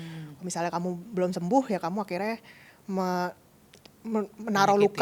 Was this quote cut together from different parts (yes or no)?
no